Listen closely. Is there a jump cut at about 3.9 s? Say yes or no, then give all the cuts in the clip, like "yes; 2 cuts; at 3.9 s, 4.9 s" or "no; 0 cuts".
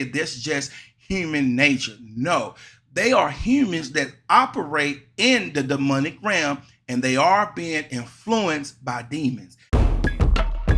no; 1 cut; at 9.5 s